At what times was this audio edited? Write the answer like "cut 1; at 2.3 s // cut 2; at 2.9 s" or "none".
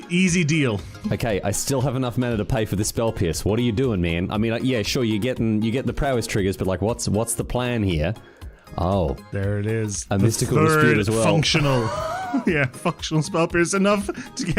cut 1; at 1.2 s